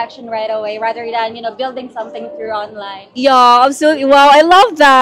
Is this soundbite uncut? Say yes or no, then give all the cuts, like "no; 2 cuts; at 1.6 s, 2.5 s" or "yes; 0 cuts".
yes; 0 cuts